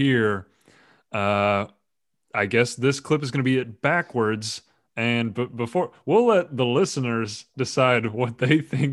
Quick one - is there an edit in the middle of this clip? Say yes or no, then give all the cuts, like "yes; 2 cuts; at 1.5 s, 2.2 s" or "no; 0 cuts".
no; 0 cuts